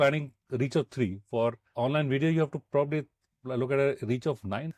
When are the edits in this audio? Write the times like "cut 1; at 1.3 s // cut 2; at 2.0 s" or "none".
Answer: cut 1; at 1.7 s